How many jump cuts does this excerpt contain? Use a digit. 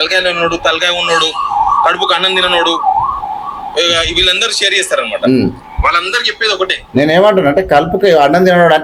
0